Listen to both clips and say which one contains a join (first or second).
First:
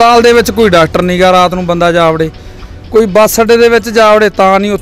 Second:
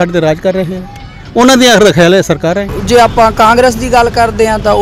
second